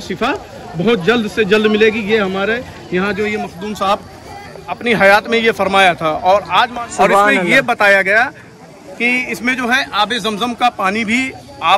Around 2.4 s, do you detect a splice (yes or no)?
no